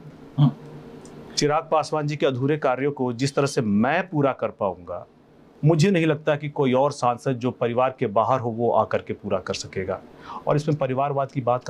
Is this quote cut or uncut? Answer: uncut